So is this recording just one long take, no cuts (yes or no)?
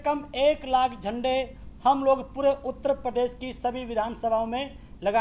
yes